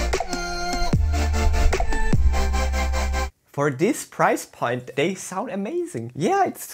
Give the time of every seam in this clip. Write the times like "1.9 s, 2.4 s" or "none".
3.3 s, 4.9 s